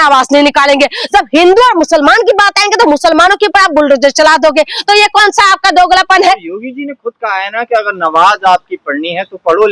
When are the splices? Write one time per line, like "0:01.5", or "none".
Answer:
none

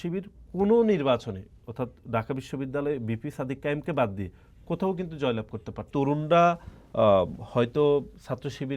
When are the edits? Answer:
0:05.9

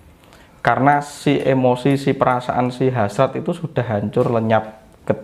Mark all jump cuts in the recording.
none

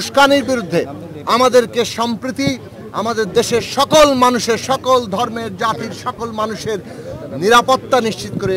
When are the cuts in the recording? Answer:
none

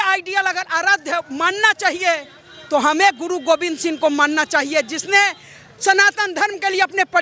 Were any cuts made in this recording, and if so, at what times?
none

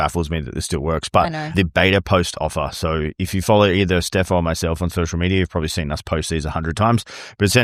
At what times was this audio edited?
none

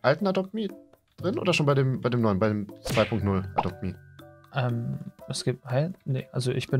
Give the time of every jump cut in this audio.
none

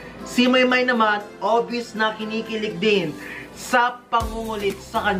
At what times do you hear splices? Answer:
none

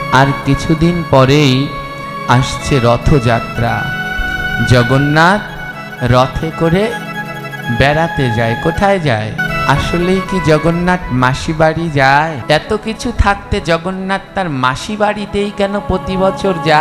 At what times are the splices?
0:09.4
0:12.4

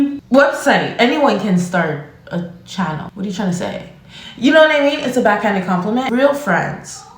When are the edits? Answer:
0:06.1

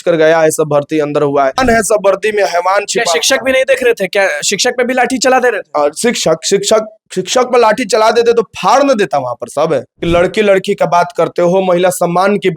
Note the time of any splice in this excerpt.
0:01.6
0:09.9

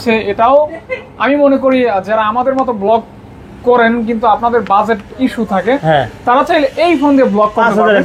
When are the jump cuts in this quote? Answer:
none

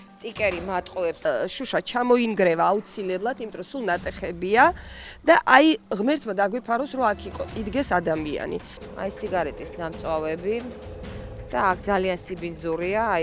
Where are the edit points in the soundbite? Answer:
0:01.2
0:08.8

